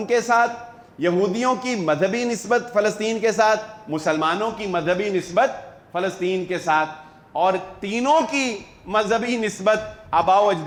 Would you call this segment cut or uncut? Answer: uncut